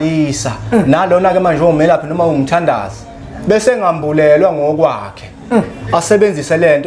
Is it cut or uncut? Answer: uncut